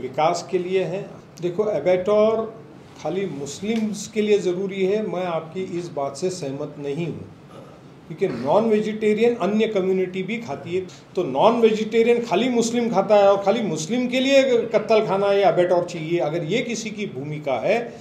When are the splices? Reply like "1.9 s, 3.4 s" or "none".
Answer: 1.4 s, 11.0 s